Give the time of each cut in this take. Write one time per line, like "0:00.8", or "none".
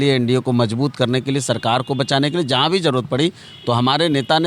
none